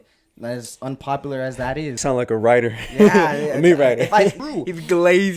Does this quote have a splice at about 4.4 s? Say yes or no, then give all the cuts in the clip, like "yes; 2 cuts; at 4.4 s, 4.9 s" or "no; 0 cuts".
yes; 2 cuts; at 1.9 s, 4.4 s